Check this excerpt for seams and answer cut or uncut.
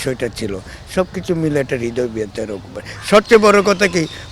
uncut